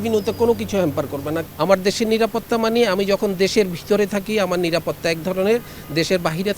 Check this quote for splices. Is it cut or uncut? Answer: cut